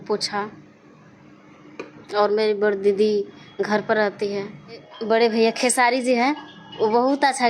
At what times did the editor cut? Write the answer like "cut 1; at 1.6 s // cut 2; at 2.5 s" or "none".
cut 1; at 4.9 s